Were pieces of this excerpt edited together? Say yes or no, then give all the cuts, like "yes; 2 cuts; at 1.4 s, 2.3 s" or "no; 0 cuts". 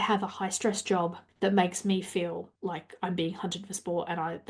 yes; 2 cuts; at 1.2 s, 2.5 s